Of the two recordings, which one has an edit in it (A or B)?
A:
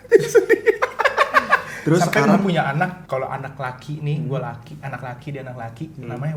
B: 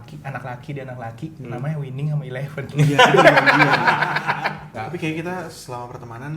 B